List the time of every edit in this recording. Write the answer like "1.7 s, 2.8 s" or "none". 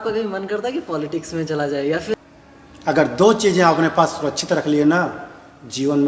2.1 s